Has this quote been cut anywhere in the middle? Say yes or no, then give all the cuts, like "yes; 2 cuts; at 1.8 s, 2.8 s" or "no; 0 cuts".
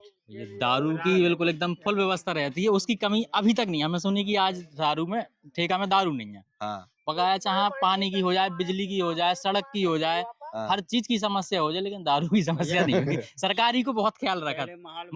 no; 0 cuts